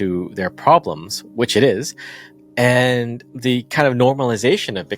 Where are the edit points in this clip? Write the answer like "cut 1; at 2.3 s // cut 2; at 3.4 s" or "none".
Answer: cut 1; at 3.2 s